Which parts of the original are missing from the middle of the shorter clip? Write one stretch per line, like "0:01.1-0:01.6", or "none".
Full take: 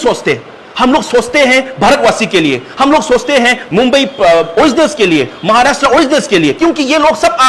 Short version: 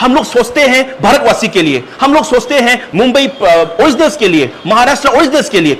none